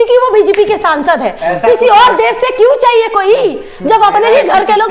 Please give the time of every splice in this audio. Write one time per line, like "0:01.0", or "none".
none

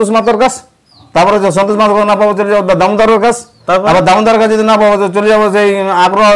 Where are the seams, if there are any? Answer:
0:01.0
0:03.6

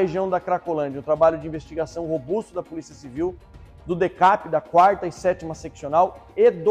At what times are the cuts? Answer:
none

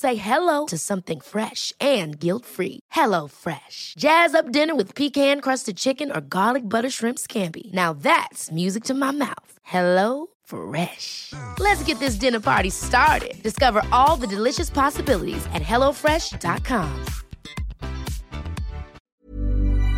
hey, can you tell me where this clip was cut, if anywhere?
0:19.0

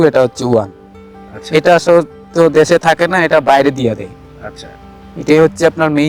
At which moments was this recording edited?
none

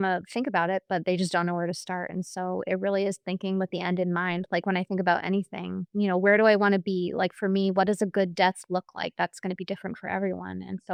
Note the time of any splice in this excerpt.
none

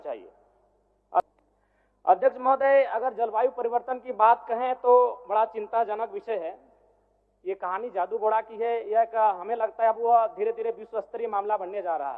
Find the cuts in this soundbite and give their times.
0:01.2

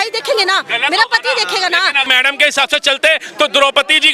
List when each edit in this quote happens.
0:02.1

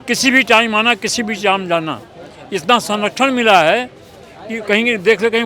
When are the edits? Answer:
none

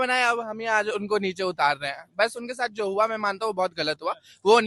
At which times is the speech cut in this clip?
none

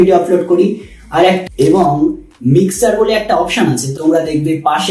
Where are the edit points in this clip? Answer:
0:01.4
0:03.9

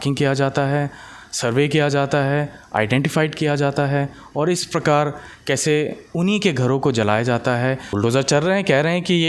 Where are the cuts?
0:07.9

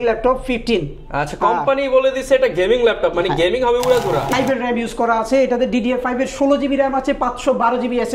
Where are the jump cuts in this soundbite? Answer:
0:04.3

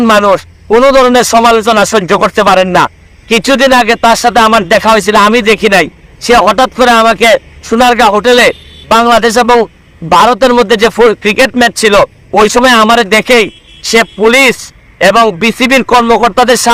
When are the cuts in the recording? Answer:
none

